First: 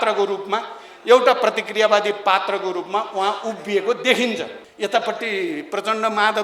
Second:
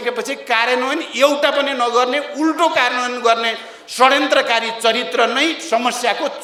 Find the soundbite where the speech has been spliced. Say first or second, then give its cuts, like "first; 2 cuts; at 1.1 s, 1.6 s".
first; 1 cut; at 4.6 s